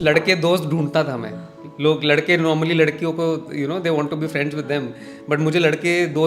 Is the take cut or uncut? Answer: uncut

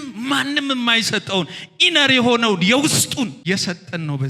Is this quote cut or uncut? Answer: cut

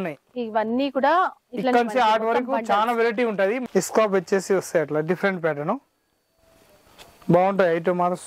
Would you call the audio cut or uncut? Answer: cut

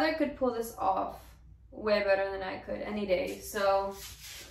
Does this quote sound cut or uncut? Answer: uncut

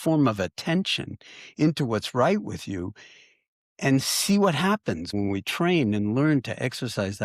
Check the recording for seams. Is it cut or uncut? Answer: cut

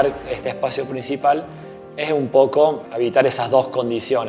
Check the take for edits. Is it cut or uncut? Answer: cut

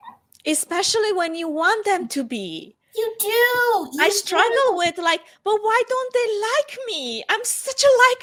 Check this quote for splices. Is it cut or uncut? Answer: uncut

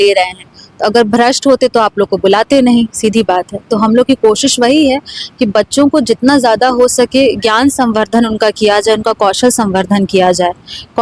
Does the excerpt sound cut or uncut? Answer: uncut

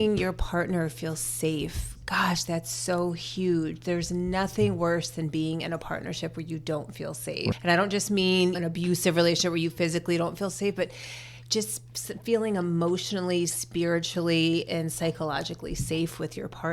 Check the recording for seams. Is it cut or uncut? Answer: cut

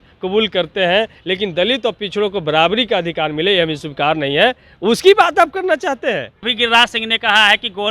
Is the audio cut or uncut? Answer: cut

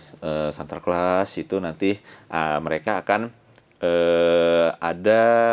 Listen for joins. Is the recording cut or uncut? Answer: uncut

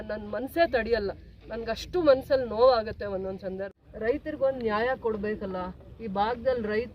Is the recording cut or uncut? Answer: cut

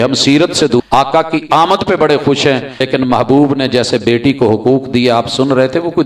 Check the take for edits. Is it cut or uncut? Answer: cut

